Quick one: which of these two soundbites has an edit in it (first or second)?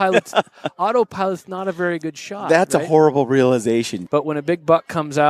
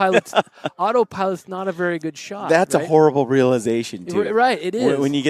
first